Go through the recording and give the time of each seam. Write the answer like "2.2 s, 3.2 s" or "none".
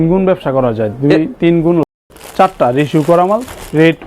2.1 s

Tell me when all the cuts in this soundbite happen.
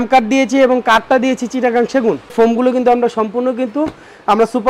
2.3 s

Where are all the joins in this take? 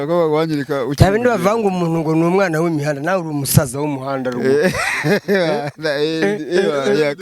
none

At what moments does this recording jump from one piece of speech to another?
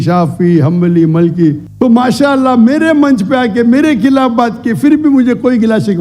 1.7 s

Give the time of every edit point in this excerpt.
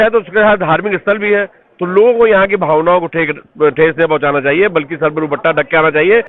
none

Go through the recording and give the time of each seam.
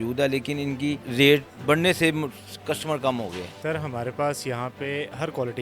1.0 s, 3.5 s

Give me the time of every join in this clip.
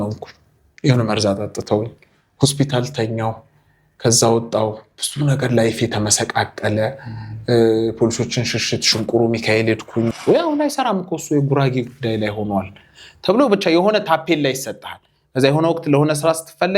10.2 s

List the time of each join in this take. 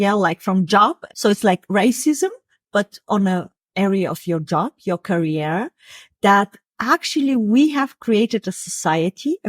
1.0 s

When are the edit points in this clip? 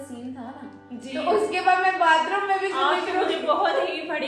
none

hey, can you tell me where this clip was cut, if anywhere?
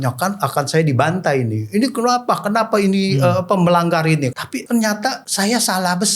4.4 s, 5.2 s

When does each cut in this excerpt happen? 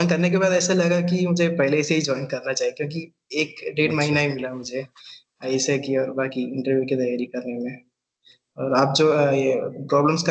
none

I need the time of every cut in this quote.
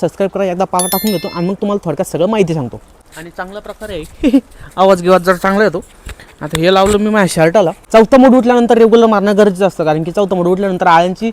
2.9 s, 7.8 s

